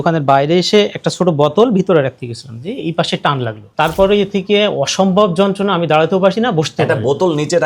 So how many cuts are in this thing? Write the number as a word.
one